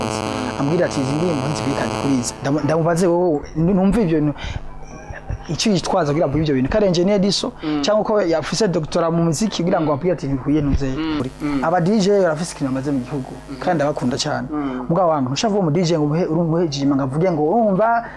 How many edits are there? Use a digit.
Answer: 1